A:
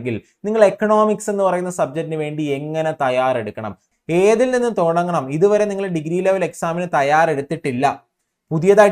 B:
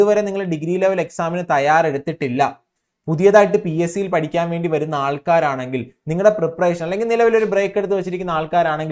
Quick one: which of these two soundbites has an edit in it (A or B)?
A